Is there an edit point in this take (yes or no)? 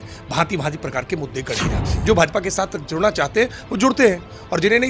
yes